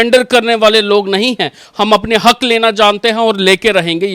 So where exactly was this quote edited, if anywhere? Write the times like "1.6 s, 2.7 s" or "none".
none